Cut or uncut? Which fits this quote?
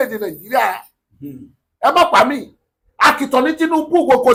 uncut